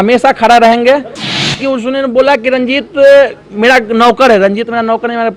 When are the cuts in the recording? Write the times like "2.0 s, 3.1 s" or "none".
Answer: 1.4 s